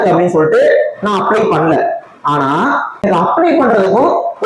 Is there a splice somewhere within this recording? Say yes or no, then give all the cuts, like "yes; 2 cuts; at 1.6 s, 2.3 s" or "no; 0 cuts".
yes; 1 cut; at 3.0 s